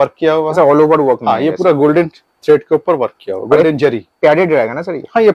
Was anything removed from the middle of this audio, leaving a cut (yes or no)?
no